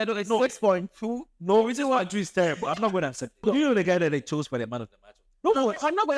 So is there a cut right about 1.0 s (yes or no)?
no